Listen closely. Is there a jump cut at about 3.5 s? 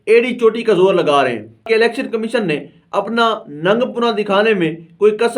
no; 1 cut; at 1.6 s

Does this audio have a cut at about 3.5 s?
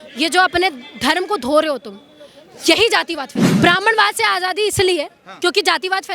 yes; 1 cut; at 3.5 s

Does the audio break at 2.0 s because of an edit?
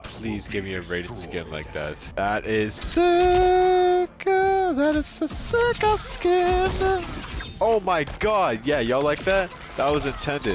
yes; 1 cut; at 2.0 s

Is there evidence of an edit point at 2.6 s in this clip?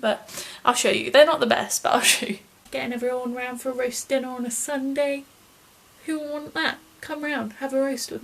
yes; 1 cut; at 2.6 s

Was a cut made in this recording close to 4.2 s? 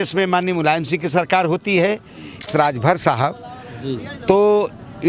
no; 1 cut; at 2.4 s

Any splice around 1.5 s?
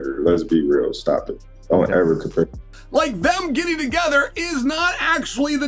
no; 1 cut; at 2.8 s

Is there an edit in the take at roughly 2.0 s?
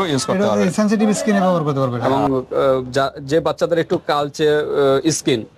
yes; 1 cut; at 2.0 s

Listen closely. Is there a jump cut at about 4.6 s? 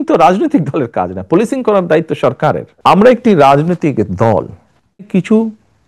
no; 1 cut; at 2.7 s

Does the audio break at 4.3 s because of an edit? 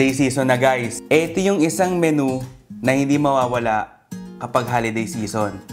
no; 1 cut; at 0.9 s

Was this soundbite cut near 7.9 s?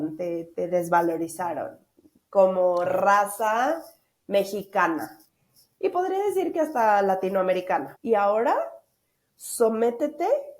yes; 1 cut; at 7.9 s

